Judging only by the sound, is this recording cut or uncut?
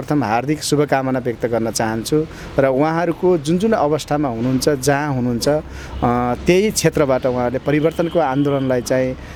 uncut